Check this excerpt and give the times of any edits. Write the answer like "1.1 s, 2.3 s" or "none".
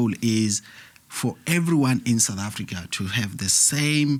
none